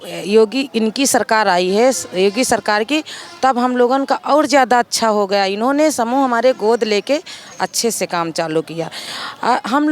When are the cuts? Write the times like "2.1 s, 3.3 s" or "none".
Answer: none